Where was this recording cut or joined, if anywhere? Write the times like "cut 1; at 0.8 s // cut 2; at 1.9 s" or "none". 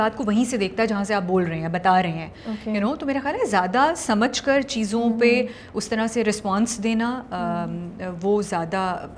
none